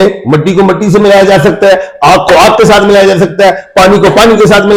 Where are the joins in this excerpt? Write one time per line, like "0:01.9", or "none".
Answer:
none